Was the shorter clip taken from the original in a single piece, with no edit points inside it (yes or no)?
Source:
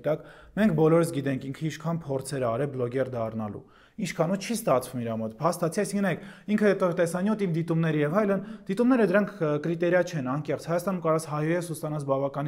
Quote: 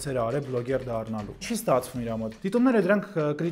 no